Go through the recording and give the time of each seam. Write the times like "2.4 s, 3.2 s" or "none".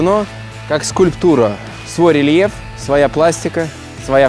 none